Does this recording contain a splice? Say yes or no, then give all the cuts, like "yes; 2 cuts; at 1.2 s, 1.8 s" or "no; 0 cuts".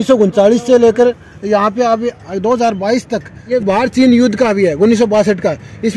yes; 1 cut; at 3.4 s